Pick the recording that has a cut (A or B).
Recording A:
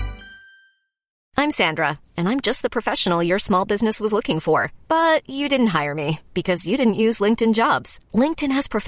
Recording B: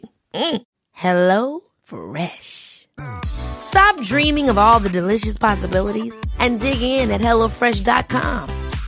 A